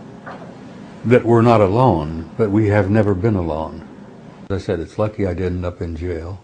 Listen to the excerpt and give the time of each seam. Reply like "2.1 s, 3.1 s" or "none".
4.5 s